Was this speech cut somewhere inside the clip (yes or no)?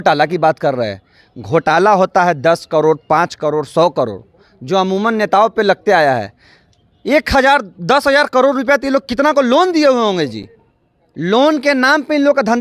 no